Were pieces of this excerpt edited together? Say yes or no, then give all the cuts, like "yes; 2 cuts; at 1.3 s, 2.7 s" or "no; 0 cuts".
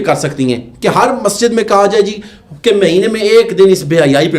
no; 0 cuts